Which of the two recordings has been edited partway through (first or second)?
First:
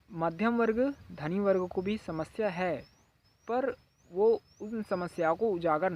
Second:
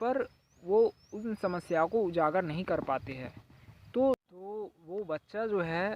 second